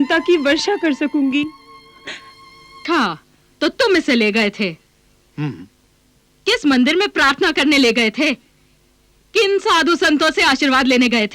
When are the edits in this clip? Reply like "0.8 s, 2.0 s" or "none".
2.8 s